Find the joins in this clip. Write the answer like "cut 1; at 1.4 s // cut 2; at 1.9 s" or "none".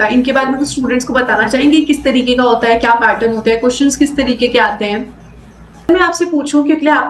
cut 1; at 5.9 s